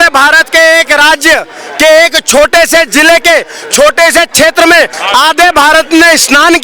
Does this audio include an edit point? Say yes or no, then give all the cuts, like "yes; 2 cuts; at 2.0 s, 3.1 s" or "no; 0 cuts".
yes; 1 cut; at 5.0 s